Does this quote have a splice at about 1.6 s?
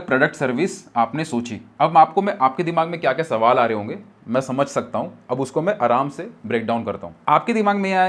no; 0 cuts

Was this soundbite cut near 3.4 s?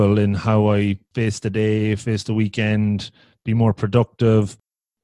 no; 1 cut; at 1.1 s

